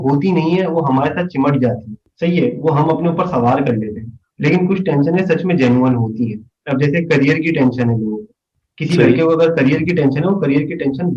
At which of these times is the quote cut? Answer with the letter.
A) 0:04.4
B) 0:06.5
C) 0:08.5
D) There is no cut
D